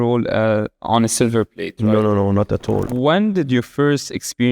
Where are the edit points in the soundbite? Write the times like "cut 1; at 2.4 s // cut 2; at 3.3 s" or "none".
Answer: cut 1; at 2.9 s